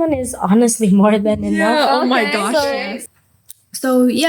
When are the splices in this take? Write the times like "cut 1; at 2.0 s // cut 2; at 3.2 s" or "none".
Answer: cut 1; at 3.0 s